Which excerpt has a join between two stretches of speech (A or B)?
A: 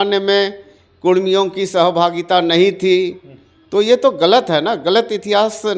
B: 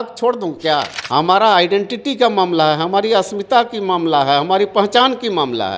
B